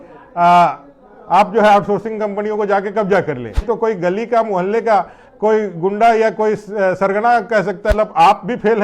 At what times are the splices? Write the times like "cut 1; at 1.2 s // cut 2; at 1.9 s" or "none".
cut 1; at 3.7 s // cut 2; at 7.9 s